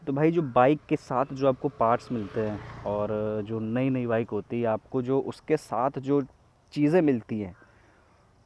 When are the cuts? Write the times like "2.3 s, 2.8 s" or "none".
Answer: none